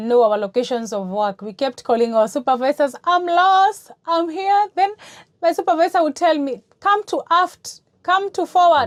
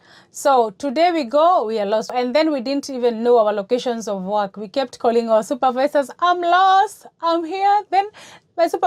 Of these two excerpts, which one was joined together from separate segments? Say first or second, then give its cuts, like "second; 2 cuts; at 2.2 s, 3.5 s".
second; 1 cut; at 2.1 s